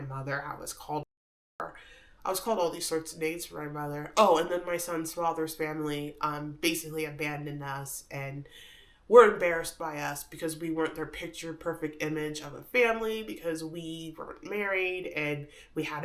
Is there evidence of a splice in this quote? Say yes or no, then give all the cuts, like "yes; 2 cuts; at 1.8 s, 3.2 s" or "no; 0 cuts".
no; 0 cuts